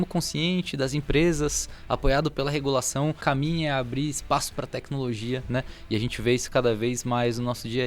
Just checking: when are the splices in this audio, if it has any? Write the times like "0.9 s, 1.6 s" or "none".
3.2 s